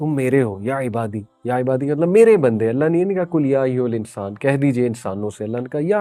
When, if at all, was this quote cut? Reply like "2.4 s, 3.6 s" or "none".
none